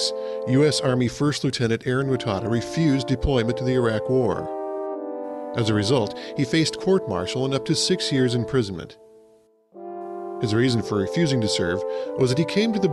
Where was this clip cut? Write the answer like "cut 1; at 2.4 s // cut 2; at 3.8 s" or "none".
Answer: none